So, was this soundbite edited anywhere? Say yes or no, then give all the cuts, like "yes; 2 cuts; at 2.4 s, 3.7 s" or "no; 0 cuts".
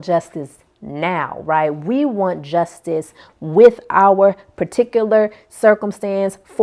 no; 0 cuts